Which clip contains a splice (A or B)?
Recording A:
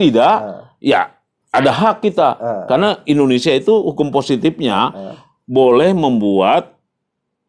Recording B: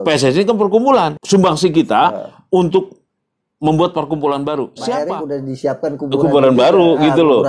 B